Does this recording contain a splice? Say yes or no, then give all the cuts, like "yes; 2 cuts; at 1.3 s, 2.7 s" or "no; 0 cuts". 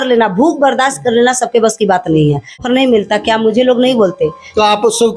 yes; 1 cut; at 2.6 s